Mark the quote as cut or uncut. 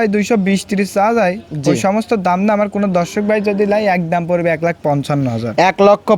uncut